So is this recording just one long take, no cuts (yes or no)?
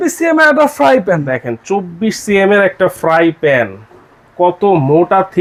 yes